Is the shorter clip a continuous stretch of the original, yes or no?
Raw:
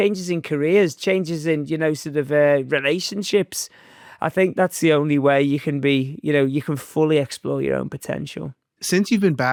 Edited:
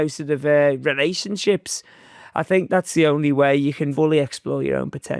no